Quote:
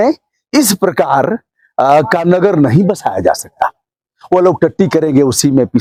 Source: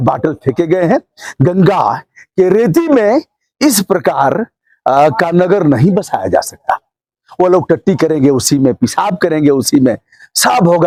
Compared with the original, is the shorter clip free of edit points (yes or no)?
yes